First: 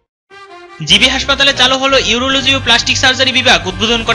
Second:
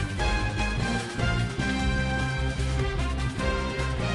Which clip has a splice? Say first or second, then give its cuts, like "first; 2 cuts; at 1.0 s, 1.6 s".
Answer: second; 1 cut; at 1.9 s